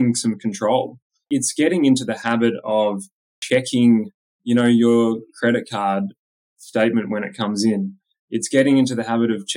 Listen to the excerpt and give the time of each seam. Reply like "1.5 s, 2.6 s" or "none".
1.2 s, 3.3 s